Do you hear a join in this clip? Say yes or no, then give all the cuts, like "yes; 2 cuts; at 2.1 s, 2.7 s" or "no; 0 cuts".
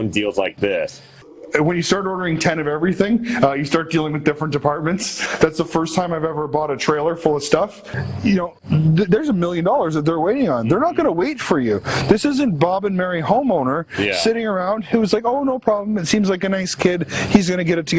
yes; 3 cuts; at 1.3 s, 5.2 s, 7.9 s